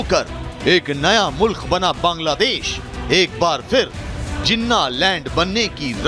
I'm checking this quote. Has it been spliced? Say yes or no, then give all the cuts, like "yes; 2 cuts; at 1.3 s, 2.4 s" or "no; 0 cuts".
no; 0 cuts